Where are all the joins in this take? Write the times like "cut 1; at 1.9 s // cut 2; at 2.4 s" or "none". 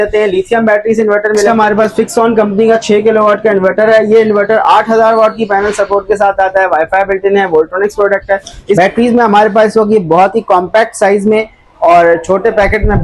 cut 1; at 1.5 s // cut 2; at 8.8 s